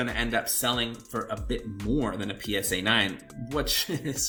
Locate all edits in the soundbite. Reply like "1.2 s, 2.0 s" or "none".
none

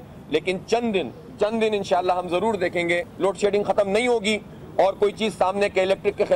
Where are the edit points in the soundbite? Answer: 1.2 s, 3.1 s

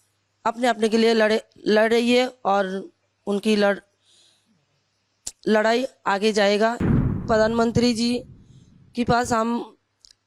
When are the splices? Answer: 7.3 s

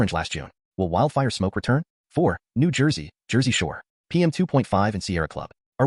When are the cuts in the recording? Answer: 1.9 s

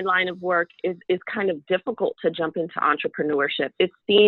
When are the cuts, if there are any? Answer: none

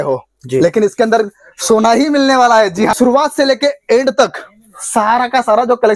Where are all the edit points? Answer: 2.9 s

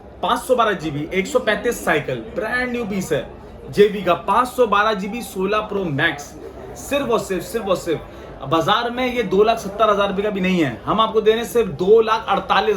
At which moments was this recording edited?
none

